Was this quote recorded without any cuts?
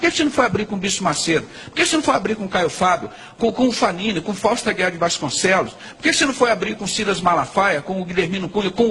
yes; 0 cuts

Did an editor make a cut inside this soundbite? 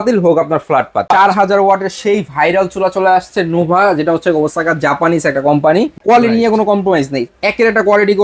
yes; 2 cuts; at 1.1 s, 5.9 s

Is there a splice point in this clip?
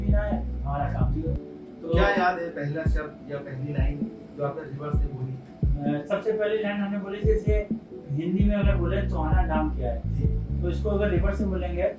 yes; 1 cut; at 1.4 s

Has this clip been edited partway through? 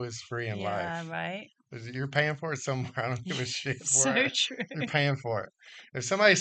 no; 0 cuts

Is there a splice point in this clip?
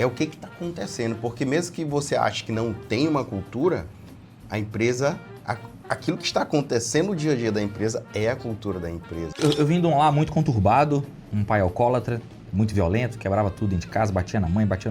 yes; 1 cut; at 9.3 s

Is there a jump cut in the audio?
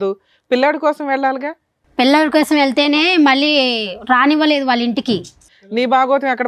yes; 1 cut; at 5.4 s

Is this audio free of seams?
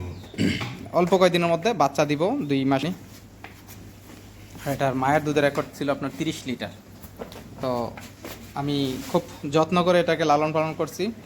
no; 1 cut; at 2.8 s

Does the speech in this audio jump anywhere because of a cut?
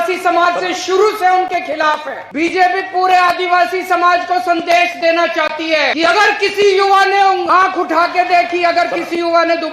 yes; 3 cuts; at 2.2 s, 5.9 s, 7.5 s

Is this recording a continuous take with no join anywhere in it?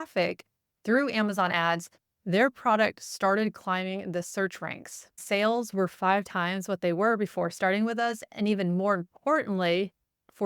no; 1 cut; at 5.2 s

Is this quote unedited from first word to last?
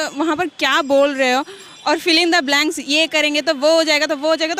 yes; 0 cuts

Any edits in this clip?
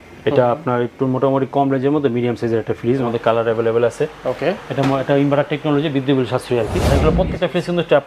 yes; 2 cuts; at 3.1 s, 6.9 s

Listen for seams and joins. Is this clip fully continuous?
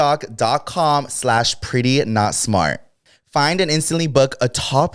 yes; 0 cuts

